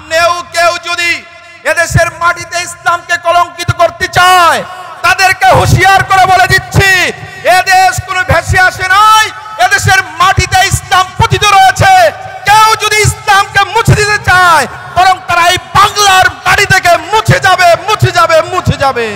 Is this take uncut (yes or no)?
yes